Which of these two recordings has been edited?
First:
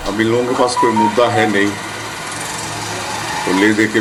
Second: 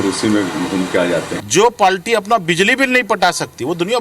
second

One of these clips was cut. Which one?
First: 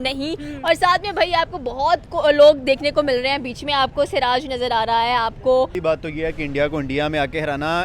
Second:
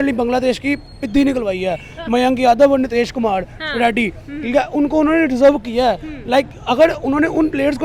first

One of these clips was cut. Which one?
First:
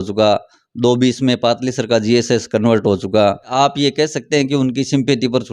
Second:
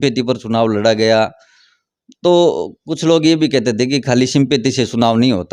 first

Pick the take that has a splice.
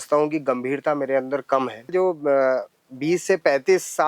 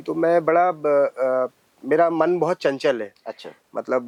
first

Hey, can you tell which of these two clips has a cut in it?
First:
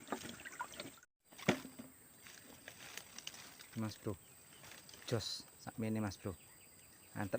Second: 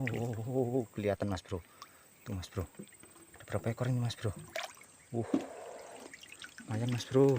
first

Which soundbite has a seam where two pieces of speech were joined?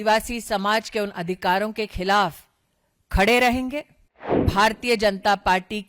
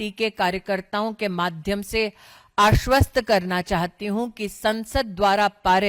first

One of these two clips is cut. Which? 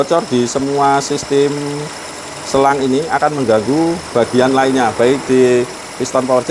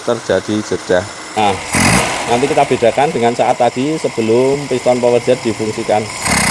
second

